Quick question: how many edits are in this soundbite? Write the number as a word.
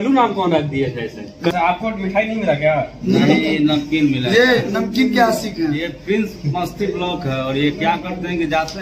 one